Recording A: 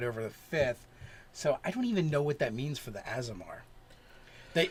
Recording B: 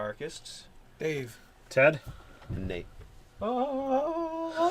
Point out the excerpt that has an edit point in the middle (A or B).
B